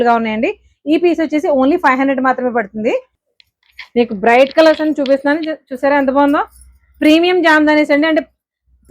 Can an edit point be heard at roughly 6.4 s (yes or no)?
no